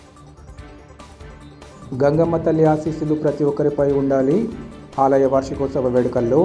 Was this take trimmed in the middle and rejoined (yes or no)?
yes